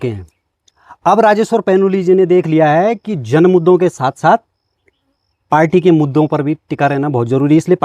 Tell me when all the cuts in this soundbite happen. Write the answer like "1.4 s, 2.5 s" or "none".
none